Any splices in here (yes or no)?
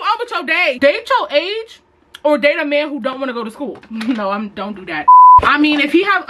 no